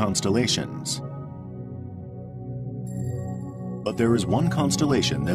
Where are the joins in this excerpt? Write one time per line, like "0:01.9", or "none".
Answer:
none